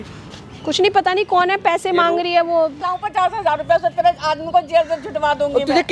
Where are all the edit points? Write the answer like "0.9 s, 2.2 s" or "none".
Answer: 2.8 s